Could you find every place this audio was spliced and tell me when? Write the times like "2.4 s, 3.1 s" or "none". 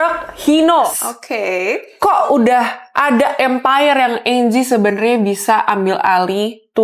1.0 s